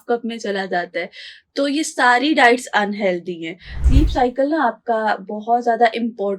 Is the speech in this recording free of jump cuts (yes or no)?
no